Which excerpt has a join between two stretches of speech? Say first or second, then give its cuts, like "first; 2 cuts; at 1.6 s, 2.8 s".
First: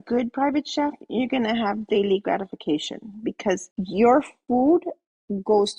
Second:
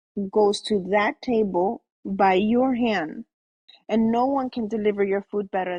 first; 1 cut; at 3.7 s